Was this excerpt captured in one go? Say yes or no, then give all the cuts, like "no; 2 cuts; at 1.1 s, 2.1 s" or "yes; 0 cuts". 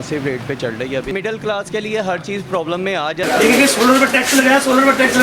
no; 2 cuts; at 1.1 s, 3.2 s